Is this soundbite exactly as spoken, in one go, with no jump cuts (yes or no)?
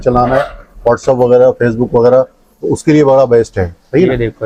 yes